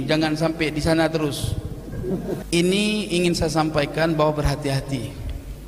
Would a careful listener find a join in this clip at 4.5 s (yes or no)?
no